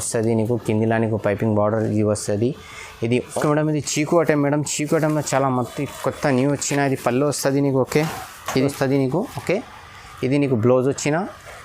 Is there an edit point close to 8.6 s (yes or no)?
yes